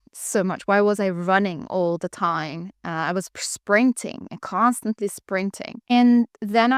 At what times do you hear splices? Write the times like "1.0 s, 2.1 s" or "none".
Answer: none